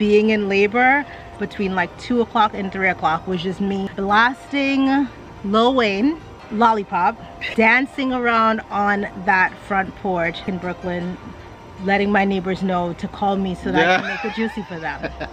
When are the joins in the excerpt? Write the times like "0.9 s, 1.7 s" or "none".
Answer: 3.9 s, 7.3 s, 10.4 s